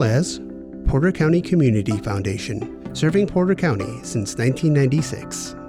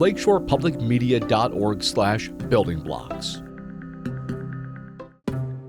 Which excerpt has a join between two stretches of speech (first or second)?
second